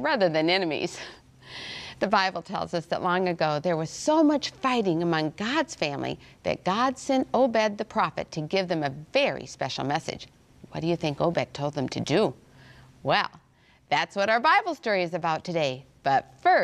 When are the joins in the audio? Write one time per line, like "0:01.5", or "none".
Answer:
none